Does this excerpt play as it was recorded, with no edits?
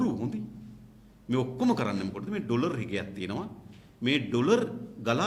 yes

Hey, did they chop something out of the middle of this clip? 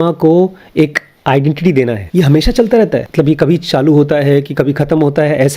yes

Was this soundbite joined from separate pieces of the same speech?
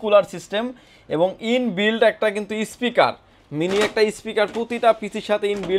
no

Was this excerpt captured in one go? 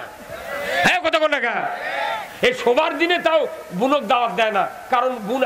yes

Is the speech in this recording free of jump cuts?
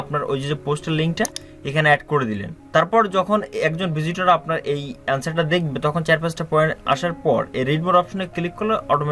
yes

